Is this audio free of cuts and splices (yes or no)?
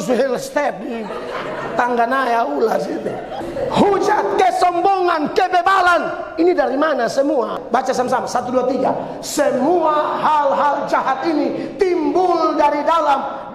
no